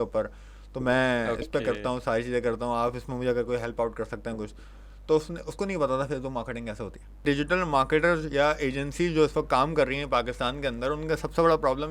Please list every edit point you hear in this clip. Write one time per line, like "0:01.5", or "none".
0:07.2